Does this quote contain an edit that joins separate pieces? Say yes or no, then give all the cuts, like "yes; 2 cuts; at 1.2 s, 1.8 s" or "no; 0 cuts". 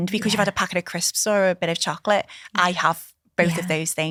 no; 0 cuts